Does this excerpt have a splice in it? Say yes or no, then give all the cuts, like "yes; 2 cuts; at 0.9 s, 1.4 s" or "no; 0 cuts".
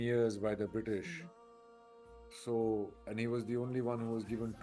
no; 0 cuts